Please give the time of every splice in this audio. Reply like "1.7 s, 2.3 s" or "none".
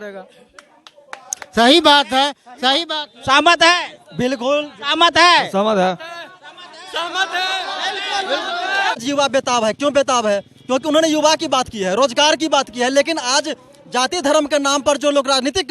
9.0 s